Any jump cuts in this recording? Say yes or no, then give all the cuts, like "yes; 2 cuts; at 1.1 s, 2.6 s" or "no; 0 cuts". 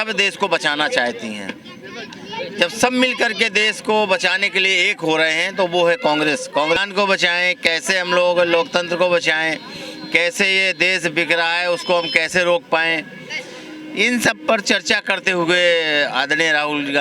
yes; 1 cut; at 6.8 s